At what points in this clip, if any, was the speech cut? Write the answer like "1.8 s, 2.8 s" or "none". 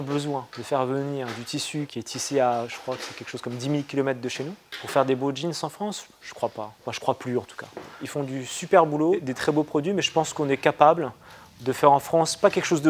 none